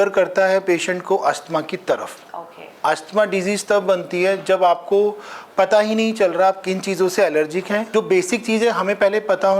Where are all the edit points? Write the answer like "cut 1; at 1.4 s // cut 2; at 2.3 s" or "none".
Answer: cut 1; at 7.9 s